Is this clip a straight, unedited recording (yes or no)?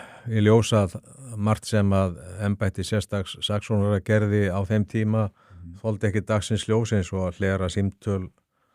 yes